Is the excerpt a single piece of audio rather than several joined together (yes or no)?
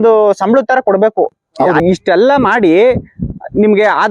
no